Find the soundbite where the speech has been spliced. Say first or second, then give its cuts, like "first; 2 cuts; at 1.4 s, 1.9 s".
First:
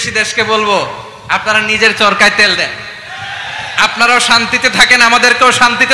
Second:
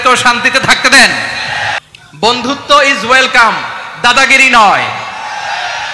second; 1 cut; at 1.8 s